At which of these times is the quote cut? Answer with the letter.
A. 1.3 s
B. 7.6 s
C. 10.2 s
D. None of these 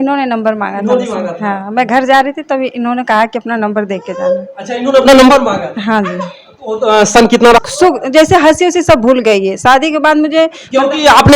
B